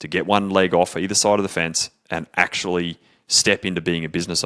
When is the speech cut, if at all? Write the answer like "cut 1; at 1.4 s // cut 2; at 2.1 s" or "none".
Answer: none